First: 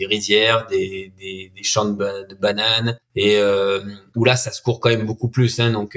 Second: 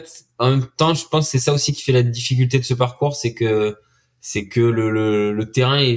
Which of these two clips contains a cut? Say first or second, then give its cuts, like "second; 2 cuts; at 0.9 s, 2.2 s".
first; 2 cuts; at 3.0 s, 4.0 s